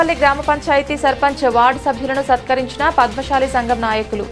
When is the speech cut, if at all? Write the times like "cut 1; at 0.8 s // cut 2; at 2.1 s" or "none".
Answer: none

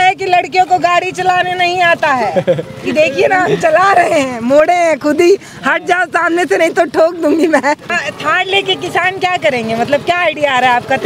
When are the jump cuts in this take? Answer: cut 1; at 8.0 s

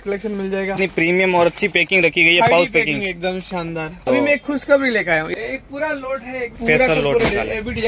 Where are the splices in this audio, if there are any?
cut 1; at 0.7 s // cut 2; at 4.0 s // cut 3; at 5.3 s // cut 4; at 6.6 s

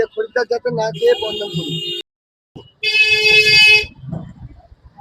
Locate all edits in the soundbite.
cut 1; at 2.0 s

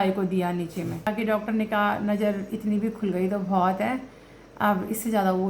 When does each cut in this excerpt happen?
cut 1; at 1.1 s

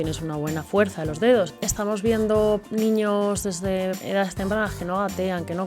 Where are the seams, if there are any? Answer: cut 1; at 1.6 s // cut 2; at 2.7 s // cut 3; at 4.0 s

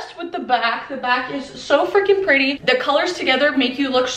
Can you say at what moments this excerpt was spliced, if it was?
cut 1; at 2.6 s

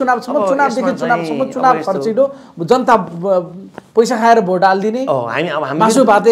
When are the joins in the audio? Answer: none

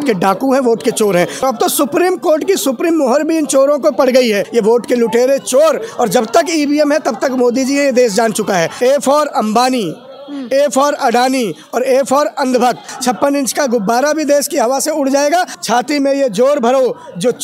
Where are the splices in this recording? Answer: cut 1; at 1.4 s // cut 2; at 4.5 s // cut 3; at 8.7 s // cut 4; at 12.9 s // cut 5; at 15.5 s

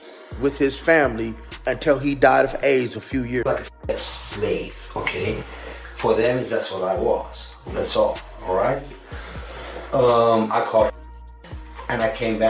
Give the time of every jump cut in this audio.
cut 1; at 3.4 s

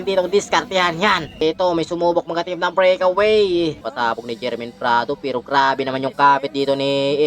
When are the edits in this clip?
cut 1; at 1.4 s // cut 2; at 3.8 s

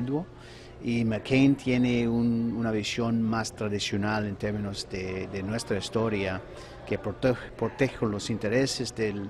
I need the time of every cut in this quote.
none

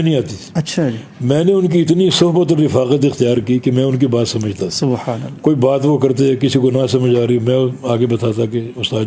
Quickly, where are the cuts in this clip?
none

